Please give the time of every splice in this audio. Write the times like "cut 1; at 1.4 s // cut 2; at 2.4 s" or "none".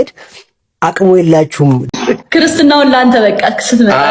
cut 1; at 1.9 s